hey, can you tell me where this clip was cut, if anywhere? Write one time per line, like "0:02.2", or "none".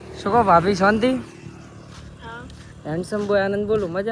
none